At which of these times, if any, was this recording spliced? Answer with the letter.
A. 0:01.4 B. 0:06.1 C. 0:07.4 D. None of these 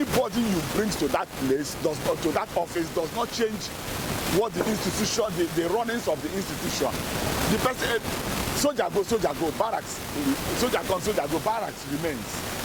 D